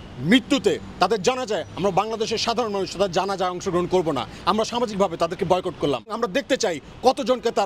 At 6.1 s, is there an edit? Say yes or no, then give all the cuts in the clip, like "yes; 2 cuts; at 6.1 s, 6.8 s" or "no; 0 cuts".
yes; 1 cut; at 6.1 s